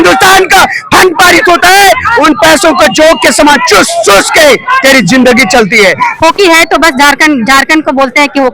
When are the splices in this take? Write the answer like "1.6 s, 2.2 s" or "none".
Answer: 6.1 s

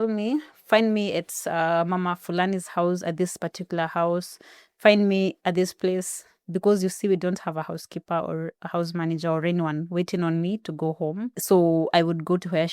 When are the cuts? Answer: 11.4 s

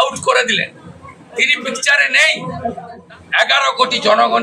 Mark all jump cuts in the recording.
2.9 s

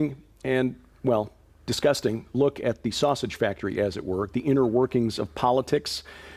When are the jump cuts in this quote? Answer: none

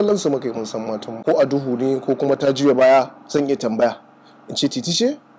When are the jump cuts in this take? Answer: 1.2 s

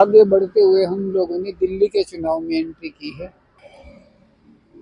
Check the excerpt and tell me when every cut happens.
3.6 s

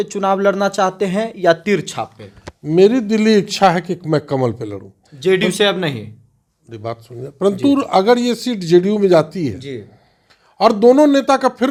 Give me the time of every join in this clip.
none

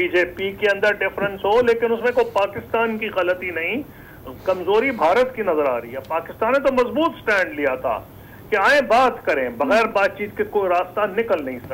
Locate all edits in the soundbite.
none

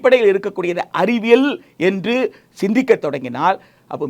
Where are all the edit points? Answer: none

